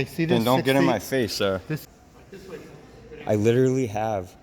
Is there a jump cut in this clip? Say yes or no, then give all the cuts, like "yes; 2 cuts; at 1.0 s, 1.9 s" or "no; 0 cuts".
yes; 1 cut; at 1.8 s